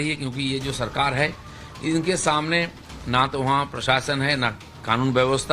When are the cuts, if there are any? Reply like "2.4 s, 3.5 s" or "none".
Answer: 4.3 s